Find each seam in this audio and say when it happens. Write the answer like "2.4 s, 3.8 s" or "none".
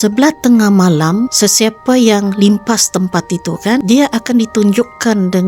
1.3 s, 3.8 s